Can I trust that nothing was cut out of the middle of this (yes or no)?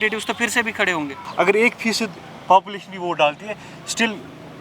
no